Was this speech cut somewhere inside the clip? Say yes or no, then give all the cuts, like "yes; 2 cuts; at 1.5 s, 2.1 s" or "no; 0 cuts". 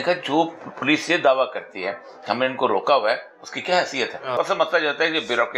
yes; 1 cut; at 4.3 s